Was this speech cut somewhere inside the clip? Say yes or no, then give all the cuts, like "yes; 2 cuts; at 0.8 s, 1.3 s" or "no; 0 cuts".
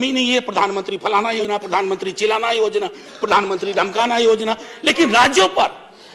yes; 1 cut; at 1.4 s